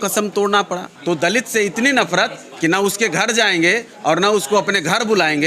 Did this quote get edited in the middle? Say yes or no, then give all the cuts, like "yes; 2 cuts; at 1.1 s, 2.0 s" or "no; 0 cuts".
yes; 1 cut; at 0.9 s